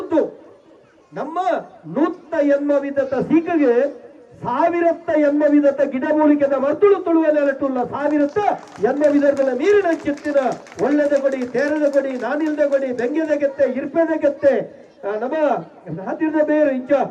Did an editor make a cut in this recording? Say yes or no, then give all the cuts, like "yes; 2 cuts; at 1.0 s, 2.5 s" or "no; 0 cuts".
no; 0 cuts